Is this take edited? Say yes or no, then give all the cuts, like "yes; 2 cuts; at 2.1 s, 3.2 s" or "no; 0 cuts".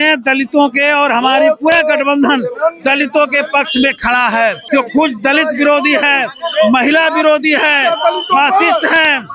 yes; 1 cut; at 4.6 s